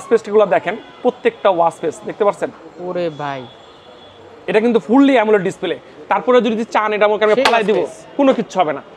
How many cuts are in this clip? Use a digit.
0